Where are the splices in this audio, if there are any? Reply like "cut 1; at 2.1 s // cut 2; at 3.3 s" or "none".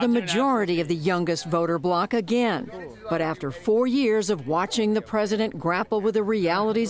cut 1; at 5.0 s